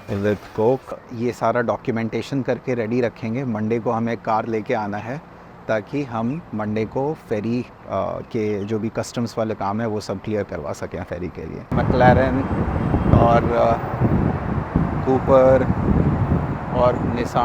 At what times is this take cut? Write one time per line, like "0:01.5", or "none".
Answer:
0:01.0
0:11.7